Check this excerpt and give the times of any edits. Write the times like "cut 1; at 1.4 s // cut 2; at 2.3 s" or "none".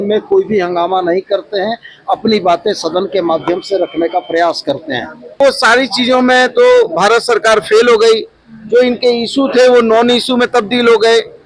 cut 1; at 5.4 s